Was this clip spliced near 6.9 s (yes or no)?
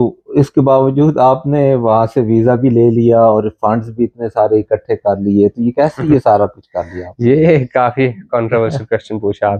no